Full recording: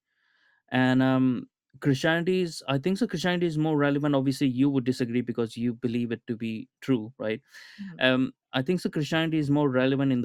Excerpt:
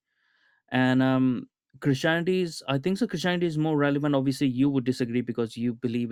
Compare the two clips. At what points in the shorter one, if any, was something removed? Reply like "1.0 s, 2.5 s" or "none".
none